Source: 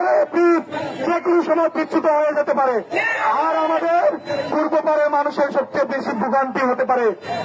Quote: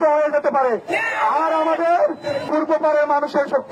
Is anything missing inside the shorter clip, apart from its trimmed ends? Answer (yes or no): no